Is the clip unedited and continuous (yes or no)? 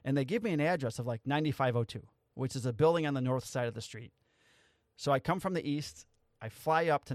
yes